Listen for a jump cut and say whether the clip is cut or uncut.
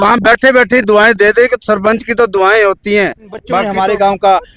cut